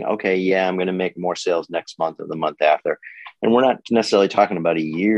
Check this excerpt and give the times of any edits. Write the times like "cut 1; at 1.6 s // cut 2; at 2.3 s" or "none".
none